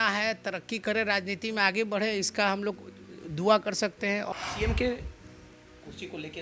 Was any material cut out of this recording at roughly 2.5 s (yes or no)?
no